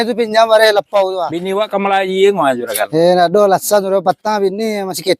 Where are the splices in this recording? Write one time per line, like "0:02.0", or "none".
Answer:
0:01.4